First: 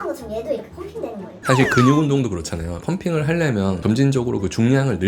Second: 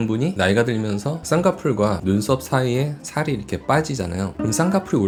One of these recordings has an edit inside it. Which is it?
first; 1 cut; at 1.3 s

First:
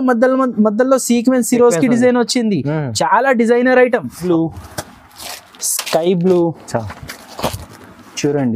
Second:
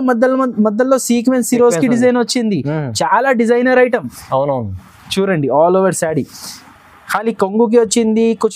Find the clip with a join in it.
first; 1 cut; at 4.2 s

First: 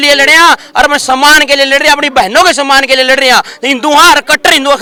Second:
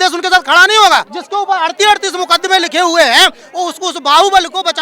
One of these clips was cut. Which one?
second; 1 cut; at 1.2 s

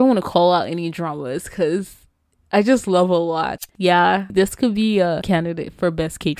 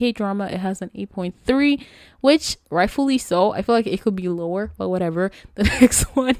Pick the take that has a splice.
first; 1 cut; at 3.6 s

